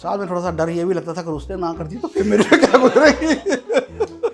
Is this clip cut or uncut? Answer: uncut